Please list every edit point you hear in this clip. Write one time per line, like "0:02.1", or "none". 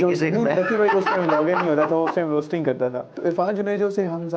0:03.1